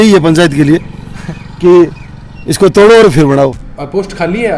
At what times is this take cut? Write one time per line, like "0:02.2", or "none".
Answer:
0:03.6

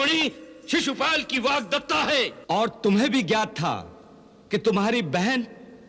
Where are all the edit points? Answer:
0:02.4

